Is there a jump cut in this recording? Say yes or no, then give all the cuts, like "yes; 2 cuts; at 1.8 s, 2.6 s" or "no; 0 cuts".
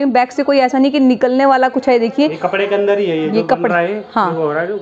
no; 0 cuts